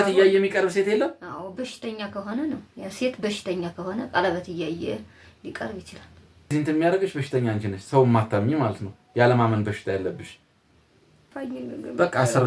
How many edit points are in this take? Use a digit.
2